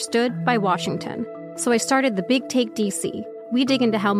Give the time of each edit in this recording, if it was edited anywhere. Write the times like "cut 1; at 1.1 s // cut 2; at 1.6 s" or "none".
cut 1; at 1.4 s // cut 2; at 3.3 s